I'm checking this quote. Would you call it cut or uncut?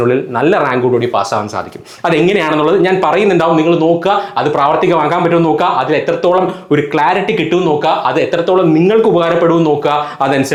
uncut